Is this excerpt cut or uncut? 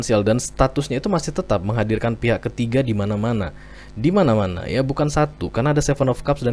uncut